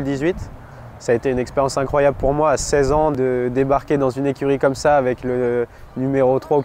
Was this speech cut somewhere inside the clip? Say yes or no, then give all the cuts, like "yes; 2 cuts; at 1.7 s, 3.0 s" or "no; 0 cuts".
no; 0 cuts